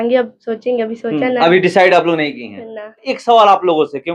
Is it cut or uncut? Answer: cut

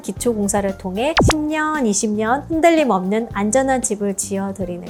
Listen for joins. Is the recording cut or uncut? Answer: uncut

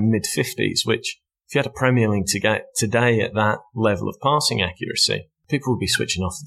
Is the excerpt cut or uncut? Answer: cut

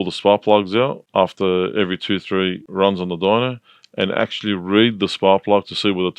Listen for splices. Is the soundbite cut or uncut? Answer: cut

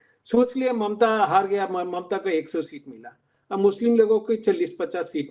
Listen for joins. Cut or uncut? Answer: uncut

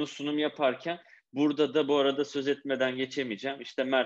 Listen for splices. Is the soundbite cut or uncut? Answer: uncut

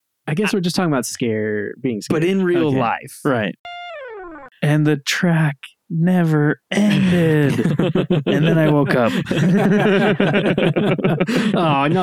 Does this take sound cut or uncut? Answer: cut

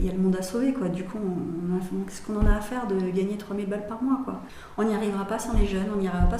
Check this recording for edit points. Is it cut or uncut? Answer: cut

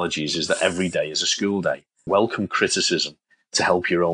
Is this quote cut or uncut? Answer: cut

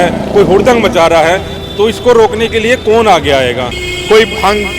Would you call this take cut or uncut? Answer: cut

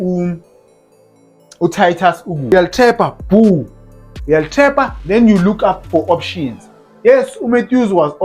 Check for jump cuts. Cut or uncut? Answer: cut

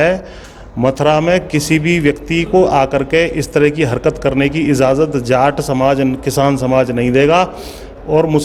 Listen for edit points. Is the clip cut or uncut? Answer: uncut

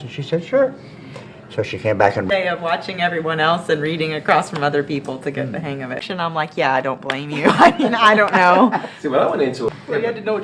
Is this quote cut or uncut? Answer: cut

